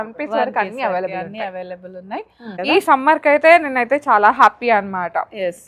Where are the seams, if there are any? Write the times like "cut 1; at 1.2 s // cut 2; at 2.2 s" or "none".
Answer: cut 1; at 2.5 s